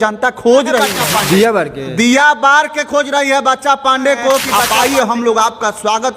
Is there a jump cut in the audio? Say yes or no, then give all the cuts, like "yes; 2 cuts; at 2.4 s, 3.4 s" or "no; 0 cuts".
yes; 2 cuts; at 1.0 s, 4.6 s